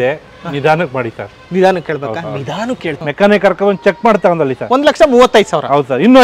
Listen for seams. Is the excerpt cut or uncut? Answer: cut